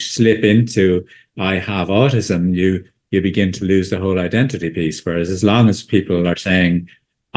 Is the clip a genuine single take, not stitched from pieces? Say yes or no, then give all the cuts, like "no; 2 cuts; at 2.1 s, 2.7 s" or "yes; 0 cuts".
yes; 0 cuts